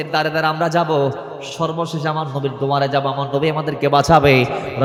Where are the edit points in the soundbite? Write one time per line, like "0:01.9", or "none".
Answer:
none